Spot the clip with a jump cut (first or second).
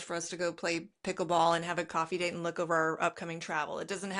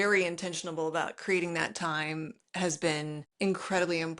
second